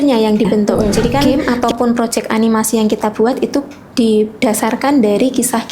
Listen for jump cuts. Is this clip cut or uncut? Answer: cut